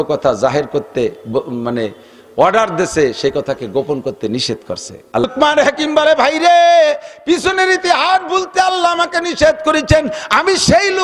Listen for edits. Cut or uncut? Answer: cut